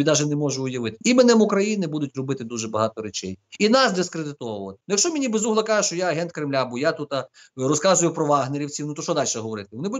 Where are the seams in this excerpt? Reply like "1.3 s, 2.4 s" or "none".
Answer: 1.0 s, 4.7 s